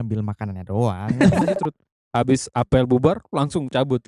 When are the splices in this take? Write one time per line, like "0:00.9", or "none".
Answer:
0:01.5